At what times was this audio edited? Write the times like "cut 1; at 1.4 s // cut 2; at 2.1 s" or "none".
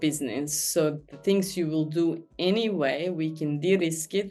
none

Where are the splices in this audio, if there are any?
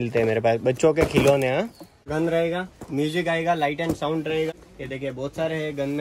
cut 1; at 2.1 s // cut 2; at 4.7 s

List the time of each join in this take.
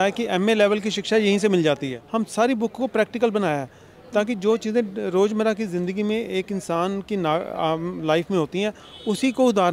cut 1; at 2.0 s

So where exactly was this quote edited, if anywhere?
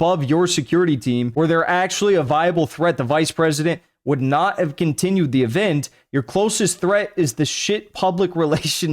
cut 1; at 1.3 s

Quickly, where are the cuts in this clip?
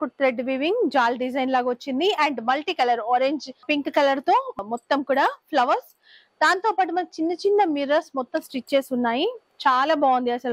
none

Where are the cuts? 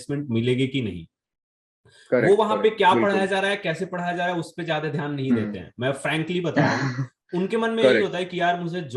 none

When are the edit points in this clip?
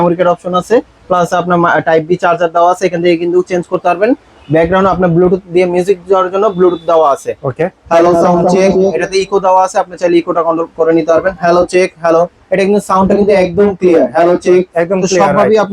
none

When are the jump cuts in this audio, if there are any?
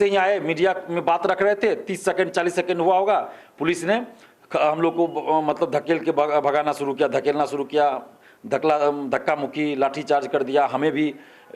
none

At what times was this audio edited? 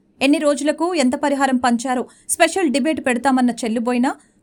none

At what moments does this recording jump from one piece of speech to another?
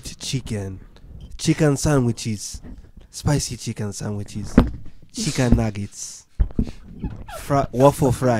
none

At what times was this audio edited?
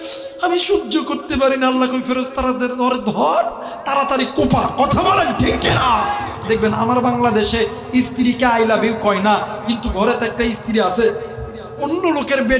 cut 1; at 6.4 s

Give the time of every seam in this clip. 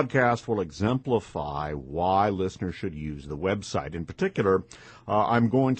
none

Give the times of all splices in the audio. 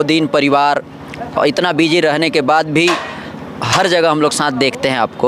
none

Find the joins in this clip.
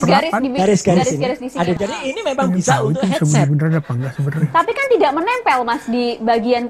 cut 1; at 1.8 s

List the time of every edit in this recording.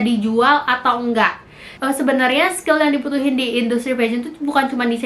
cut 1; at 1.8 s

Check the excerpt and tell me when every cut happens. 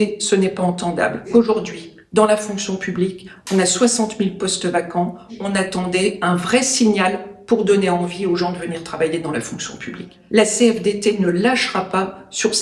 cut 1; at 1.3 s // cut 2; at 5.4 s // cut 3; at 10.1 s

